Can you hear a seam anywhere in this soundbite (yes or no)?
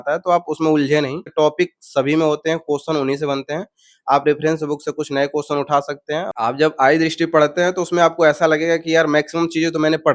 yes